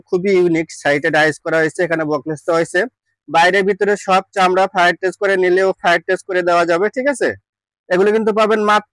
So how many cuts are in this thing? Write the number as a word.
zero